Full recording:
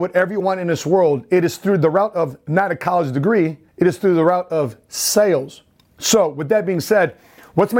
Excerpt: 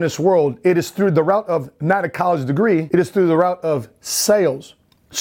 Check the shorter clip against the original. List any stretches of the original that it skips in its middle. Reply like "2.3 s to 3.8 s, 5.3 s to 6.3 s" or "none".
3.5 s to 3.7 s

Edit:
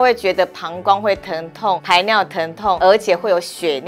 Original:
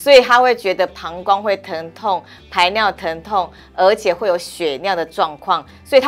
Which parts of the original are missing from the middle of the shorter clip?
2.2 s to 2.5 s, 3.5 s to 3.8 s

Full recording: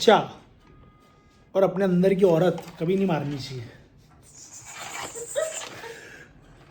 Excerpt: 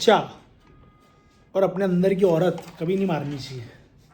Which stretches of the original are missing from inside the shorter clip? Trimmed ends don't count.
none

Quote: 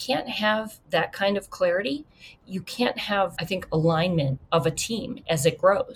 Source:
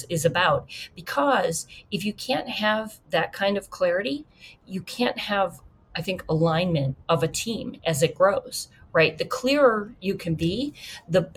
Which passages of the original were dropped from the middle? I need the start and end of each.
5.6 s to 6.0 s

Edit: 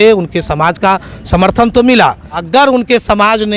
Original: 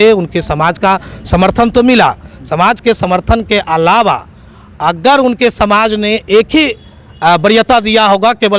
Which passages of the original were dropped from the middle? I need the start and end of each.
2.3 s to 4.8 s

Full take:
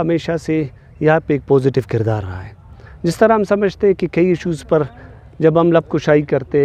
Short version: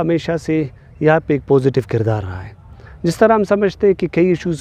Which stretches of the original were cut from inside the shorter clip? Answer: none

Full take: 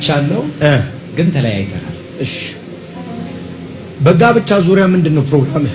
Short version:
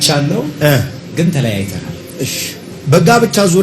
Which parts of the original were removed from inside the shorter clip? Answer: 2.7 s to 3.8 s

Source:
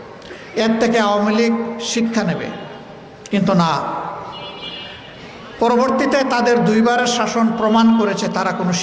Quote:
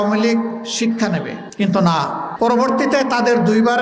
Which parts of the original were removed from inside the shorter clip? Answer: 2.5 s to 3.1 s, 4.0 s to 5.5 s

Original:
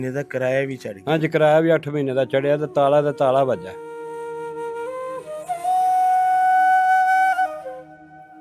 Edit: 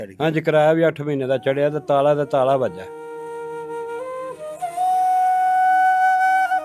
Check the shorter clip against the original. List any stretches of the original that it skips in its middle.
none

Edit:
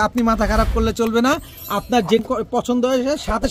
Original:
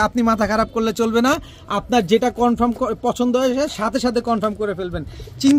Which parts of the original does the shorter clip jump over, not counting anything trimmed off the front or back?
2.2 s to 2.7 s

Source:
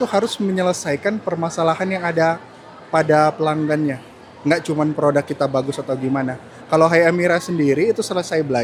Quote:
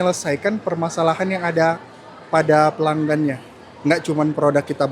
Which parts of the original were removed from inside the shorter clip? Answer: none

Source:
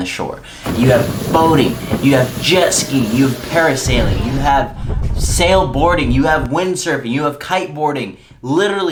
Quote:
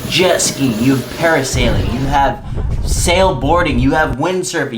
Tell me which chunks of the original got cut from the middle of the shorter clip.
none

